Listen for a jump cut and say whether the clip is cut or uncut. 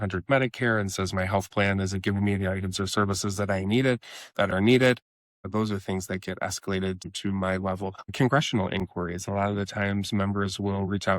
cut